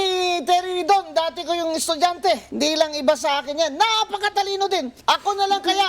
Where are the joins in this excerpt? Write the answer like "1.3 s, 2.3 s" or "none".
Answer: 2.5 s, 4.9 s